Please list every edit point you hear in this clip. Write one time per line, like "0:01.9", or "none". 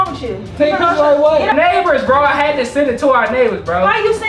0:01.5